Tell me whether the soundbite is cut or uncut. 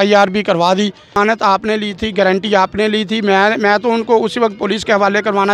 cut